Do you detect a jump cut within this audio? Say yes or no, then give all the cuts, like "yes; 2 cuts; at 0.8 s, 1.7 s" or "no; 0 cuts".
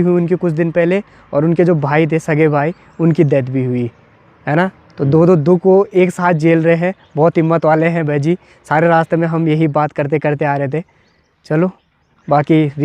no; 0 cuts